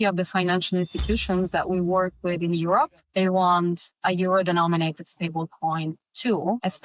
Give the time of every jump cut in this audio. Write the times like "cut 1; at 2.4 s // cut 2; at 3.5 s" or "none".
none